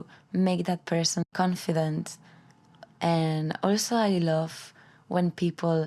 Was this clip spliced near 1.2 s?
yes; 1 cut; at 1.2 s

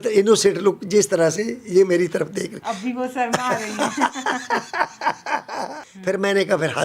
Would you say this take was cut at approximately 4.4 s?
no; 1 cut; at 5.8 s

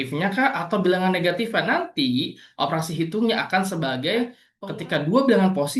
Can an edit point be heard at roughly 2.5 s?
no; 1 cut; at 4.5 s

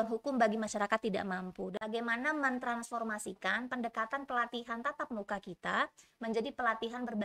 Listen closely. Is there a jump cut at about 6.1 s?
no; 1 cut; at 1.7 s

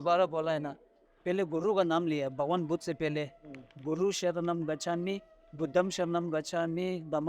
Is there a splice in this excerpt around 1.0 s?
yes; 1 cut; at 1.0 s

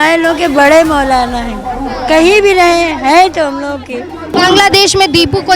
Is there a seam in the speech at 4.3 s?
yes; 1 cut; at 4.3 s

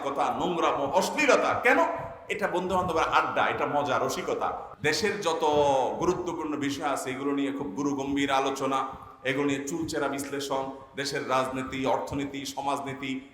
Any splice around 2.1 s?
no; 1 cut; at 4.6 s

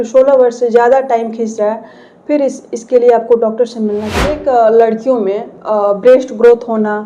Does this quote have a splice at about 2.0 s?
no; 1 cut; at 4.4 s

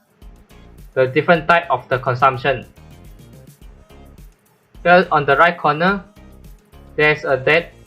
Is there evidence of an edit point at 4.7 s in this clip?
yes; 2 cuts; at 3.1 s, 4.7 s

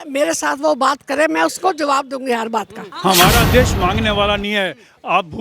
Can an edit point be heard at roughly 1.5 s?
no; 1 cut; at 2.8 s

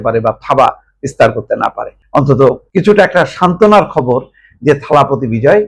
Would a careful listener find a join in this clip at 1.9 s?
yes; 2 cuts; at 1.9 s, 2.6 s

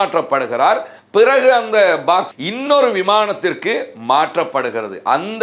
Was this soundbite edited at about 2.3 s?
yes; 1 cut; at 2.3 s

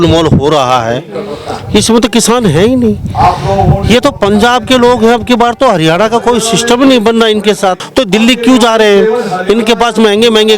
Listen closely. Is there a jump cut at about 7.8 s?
yes; 1 cut; at 7.8 s

